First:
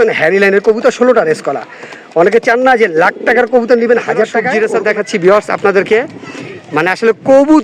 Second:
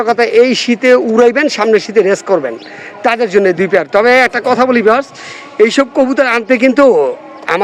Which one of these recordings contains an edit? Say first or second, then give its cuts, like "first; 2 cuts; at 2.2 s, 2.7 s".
first; 1 cut; at 4.4 s